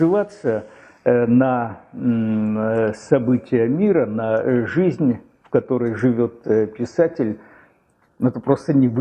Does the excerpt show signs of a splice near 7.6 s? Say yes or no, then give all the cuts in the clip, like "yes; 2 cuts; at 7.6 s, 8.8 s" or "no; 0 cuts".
no; 0 cuts